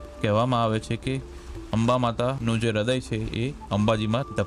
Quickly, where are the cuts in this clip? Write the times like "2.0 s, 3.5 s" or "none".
none